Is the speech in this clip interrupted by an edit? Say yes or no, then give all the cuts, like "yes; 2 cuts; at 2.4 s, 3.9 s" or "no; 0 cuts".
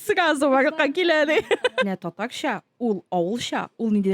yes; 1 cut; at 1.8 s